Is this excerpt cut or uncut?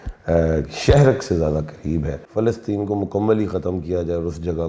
cut